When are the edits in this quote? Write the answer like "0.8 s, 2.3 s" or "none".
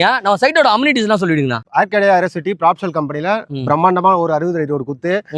1.6 s